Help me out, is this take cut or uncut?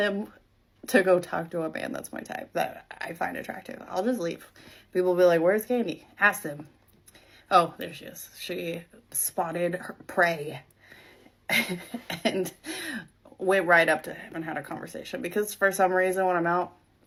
uncut